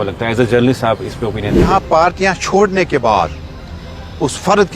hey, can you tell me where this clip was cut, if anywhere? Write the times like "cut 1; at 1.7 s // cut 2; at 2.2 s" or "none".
cut 1; at 1.6 s